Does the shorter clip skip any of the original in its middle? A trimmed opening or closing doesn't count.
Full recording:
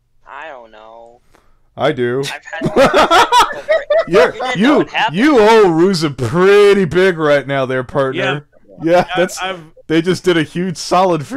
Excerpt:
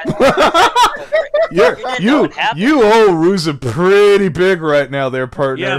no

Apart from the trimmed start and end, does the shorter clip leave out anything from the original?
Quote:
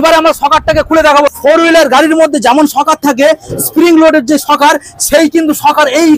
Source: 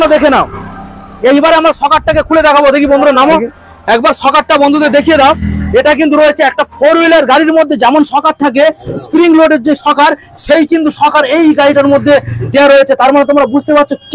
yes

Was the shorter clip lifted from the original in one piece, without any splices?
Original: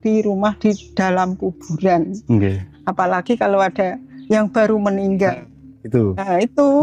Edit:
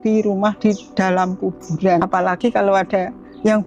no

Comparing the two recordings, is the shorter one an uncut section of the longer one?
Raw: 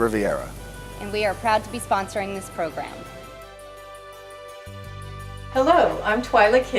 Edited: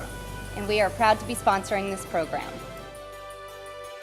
no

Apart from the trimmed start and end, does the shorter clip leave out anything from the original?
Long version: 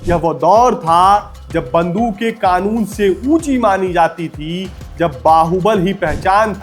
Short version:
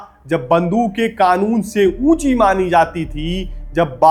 no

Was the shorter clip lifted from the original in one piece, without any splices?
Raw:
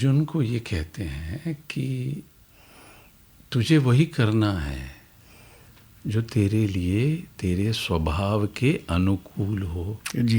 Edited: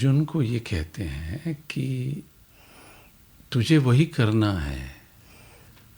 yes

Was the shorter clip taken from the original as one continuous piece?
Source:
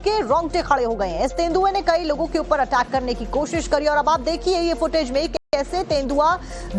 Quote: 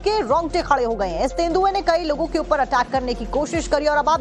yes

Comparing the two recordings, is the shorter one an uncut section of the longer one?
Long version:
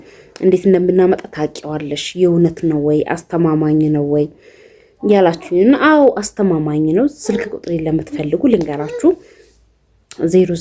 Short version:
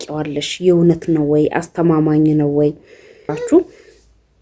no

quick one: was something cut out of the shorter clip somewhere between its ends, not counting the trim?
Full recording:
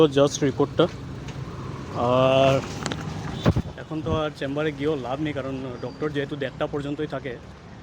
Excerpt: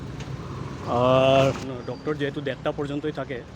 yes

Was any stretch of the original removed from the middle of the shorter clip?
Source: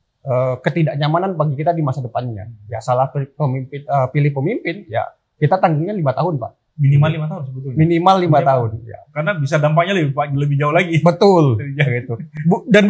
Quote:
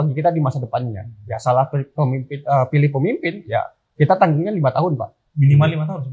no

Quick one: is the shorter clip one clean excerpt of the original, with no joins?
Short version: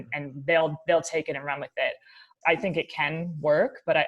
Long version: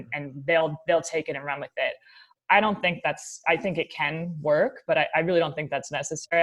no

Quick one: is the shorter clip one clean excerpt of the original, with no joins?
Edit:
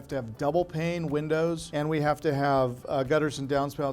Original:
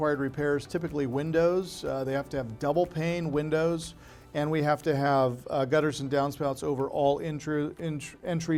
no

